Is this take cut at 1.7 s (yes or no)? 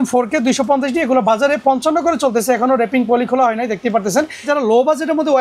no